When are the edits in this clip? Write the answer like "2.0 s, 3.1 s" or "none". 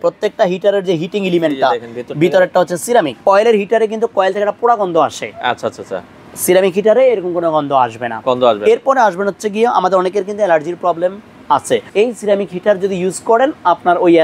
3.2 s, 11.9 s